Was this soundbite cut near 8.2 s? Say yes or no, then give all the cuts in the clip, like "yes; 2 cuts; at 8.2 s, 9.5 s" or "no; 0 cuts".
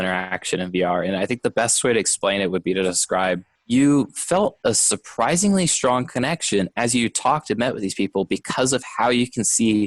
no; 1 cut; at 3.5 s